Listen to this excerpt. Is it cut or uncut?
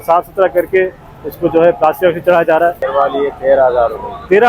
cut